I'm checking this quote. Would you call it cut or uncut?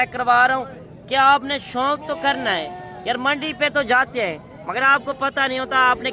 uncut